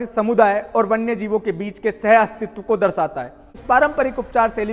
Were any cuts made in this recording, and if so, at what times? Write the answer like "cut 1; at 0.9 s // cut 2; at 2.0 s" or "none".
cut 1; at 3.5 s